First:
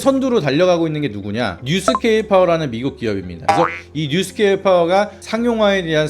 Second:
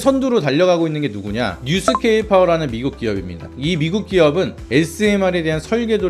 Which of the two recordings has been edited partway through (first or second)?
first